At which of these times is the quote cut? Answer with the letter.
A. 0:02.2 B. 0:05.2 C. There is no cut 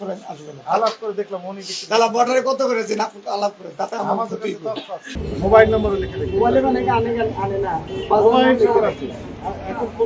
B